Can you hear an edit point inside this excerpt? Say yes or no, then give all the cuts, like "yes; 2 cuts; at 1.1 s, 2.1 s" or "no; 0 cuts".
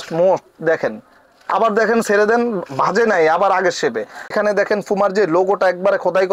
yes; 1 cut; at 4.3 s